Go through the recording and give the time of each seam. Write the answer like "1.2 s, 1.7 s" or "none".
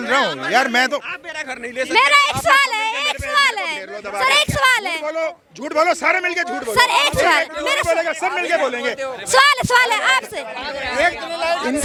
none

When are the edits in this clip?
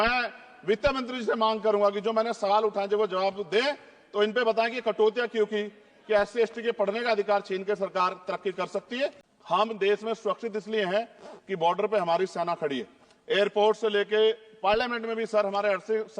9.3 s

